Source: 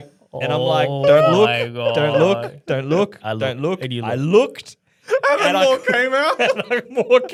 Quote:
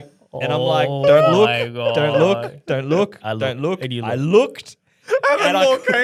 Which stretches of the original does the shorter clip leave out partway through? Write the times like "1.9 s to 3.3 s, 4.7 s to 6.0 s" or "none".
none